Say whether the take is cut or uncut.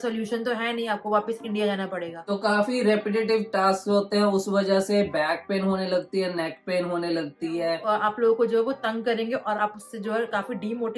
cut